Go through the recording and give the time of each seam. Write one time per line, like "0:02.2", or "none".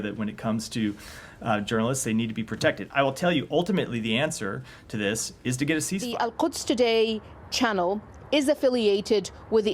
0:06.1